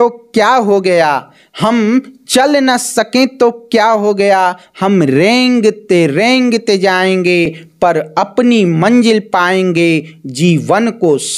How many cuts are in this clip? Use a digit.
0